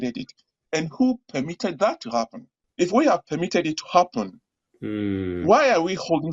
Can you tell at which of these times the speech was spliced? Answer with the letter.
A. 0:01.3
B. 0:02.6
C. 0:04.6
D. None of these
B